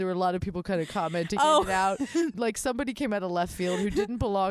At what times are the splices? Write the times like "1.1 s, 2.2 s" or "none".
2.3 s